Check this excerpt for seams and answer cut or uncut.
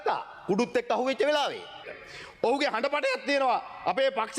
cut